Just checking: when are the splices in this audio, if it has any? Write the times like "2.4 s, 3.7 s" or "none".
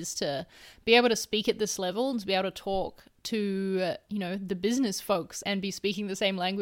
5.3 s